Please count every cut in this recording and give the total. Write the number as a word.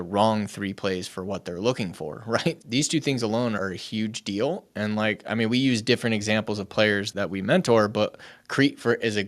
three